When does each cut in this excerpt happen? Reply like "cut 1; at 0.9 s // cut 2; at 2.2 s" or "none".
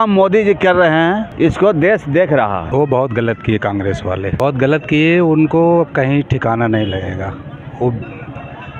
cut 1; at 1.3 s // cut 2; at 2.7 s // cut 3; at 4.3 s